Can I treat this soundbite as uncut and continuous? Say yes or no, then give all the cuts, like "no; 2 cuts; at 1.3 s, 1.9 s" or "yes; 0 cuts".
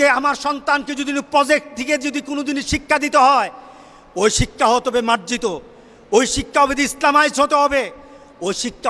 yes; 0 cuts